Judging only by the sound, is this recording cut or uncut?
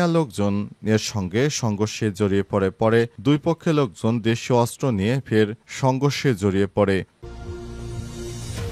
cut